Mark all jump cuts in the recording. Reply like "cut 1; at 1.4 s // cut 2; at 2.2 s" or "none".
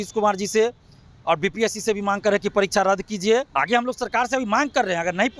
cut 1; at 3.5 s